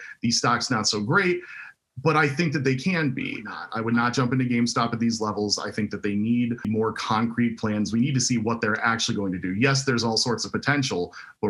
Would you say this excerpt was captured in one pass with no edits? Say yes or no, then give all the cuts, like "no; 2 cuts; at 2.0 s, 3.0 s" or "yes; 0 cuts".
no; 2 cuts; at 3.6 s, 6.7 s